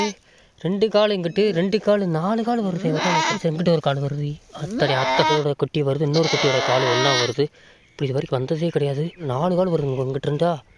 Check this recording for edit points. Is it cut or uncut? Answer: cut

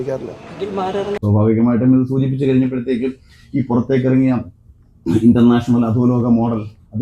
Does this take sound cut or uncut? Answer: cut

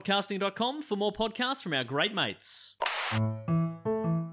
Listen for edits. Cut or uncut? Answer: cut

